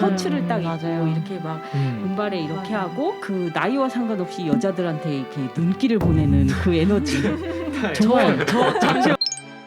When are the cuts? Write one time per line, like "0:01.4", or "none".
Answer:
none